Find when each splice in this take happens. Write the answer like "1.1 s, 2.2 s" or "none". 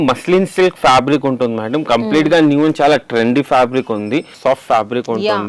4.4 s